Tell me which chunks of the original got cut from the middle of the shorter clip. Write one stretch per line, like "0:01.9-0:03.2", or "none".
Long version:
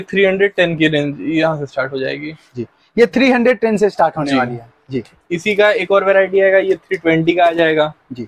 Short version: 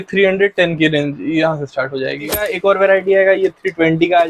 0:02.5-0:05.7

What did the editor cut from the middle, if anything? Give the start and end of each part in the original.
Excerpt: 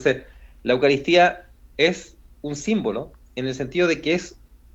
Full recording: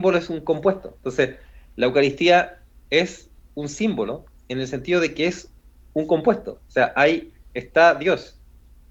none

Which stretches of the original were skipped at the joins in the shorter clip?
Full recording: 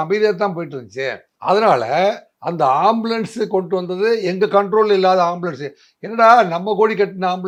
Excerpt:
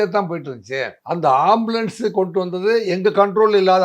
0:01.2-0:02.3

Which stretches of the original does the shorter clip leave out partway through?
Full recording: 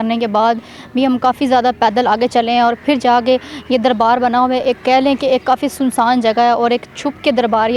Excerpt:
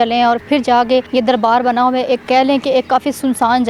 0:03.4-0:03.6

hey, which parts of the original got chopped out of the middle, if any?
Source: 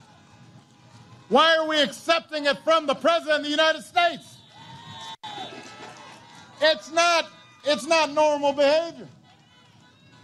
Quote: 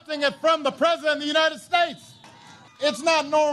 0:04.8-0:07.4

